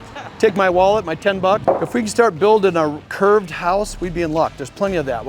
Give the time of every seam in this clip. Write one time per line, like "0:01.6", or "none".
0:01.6